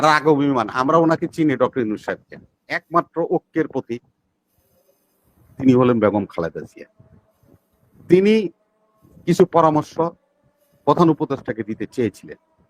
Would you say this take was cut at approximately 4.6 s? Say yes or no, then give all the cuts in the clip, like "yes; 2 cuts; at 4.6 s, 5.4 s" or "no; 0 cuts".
no; 1 cut; at 2.8 s